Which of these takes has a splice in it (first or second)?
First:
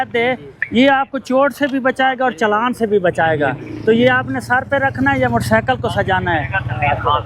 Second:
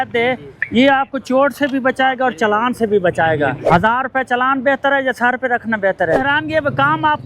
second